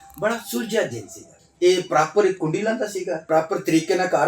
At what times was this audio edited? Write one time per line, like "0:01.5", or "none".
0:01.4
0:03.3